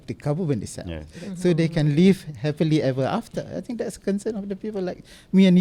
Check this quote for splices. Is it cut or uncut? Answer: uncut